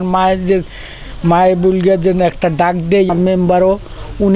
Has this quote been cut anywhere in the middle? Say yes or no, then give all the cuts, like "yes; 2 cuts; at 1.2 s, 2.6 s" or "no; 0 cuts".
yes; 1 cut; at 3.1 s